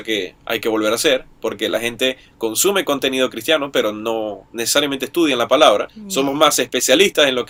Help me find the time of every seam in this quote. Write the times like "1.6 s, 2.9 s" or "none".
none